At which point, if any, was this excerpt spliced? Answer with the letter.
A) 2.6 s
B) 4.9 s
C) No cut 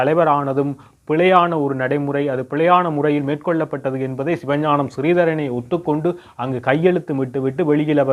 C